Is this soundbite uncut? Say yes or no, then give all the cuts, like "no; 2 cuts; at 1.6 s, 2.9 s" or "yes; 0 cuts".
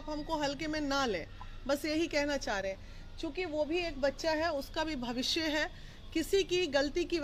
yes; 0 cuts